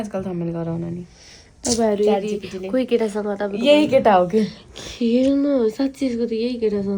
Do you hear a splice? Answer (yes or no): no